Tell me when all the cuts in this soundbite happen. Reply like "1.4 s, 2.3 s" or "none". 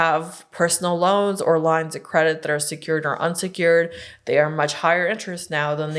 none